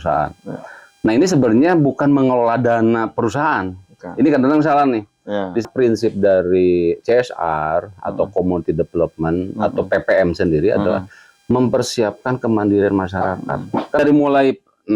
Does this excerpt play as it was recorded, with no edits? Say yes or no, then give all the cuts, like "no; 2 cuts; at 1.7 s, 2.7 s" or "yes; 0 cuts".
no; 2 cuts; at 5.6 s, 14.0 s